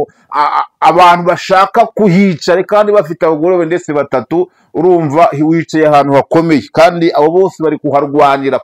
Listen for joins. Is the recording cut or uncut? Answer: uncut